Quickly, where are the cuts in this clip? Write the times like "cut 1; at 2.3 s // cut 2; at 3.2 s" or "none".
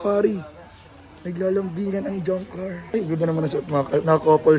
cut 1; at 2.9 s